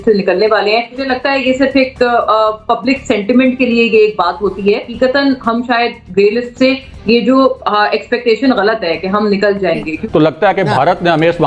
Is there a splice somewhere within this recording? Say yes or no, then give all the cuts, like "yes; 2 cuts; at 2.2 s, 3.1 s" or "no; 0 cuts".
yes; 3 cuts; at 1.0 s, 4.9 s, 9.9 s